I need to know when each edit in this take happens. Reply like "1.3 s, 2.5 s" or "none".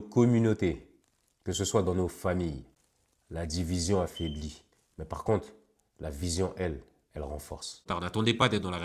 7.8 s